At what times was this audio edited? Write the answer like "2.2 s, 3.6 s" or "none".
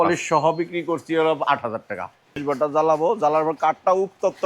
2.4 s